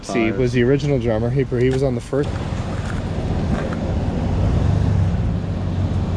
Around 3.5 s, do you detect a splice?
no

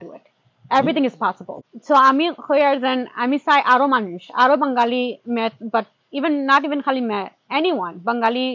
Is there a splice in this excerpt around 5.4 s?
no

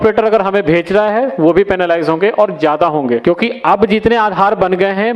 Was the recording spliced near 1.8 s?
no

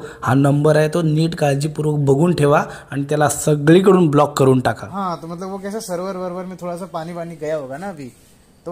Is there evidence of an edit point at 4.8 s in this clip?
yes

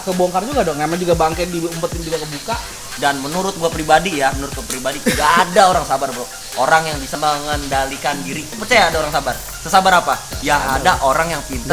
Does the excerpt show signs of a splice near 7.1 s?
yes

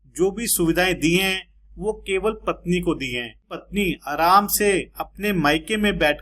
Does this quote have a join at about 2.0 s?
no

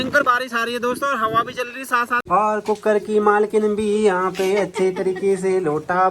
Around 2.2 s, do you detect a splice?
yes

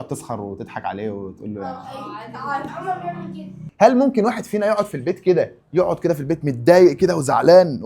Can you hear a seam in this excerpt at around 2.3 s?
no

